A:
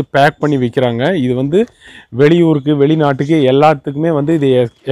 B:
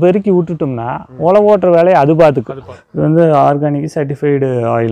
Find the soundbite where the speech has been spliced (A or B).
B